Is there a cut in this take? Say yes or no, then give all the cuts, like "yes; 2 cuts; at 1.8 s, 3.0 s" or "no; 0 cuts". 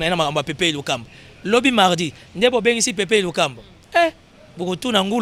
no; 0 cuts